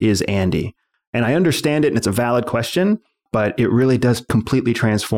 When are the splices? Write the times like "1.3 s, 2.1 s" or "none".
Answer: 3.1 s, 4.2 s